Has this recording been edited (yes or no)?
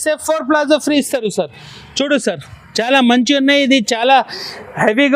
no